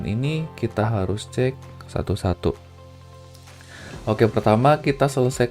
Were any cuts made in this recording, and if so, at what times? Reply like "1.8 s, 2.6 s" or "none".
2.6 s, 4.0 s